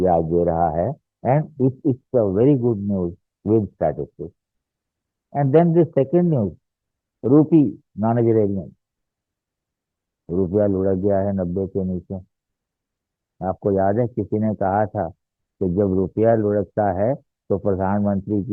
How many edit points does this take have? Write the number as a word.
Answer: zero